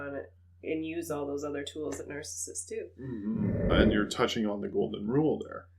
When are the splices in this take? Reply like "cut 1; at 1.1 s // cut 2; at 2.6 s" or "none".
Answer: cut 1; at 3.7 s